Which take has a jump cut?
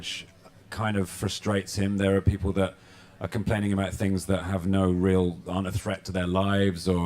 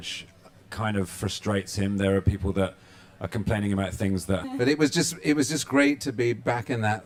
first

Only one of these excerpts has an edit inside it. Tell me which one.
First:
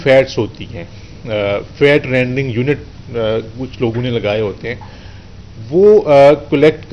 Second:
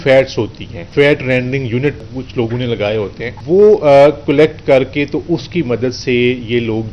second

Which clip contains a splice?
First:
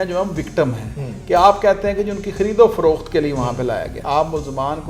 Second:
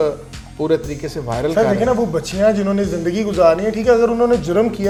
first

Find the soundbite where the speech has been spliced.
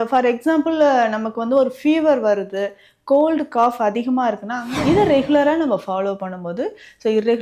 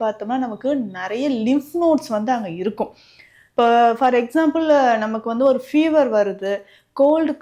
first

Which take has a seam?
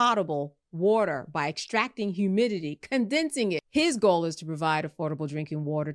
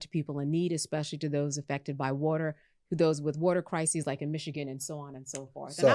first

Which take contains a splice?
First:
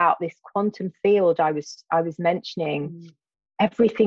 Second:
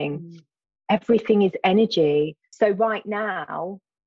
second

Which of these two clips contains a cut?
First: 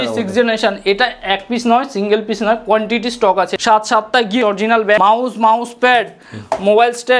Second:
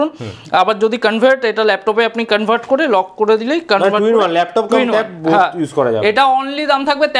first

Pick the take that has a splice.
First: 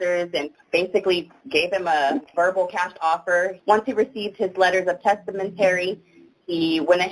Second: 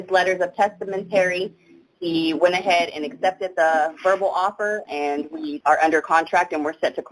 first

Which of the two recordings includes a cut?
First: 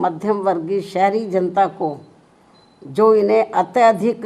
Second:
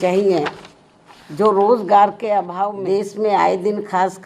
second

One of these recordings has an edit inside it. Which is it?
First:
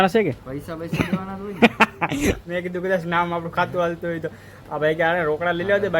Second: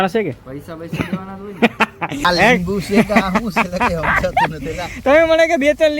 second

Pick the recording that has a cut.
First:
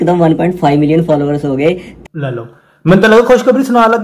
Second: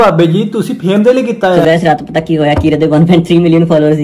second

